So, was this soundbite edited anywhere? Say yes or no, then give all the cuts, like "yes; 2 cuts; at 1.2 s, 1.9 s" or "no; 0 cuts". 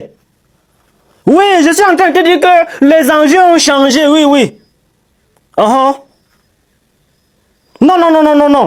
no; 0 cuts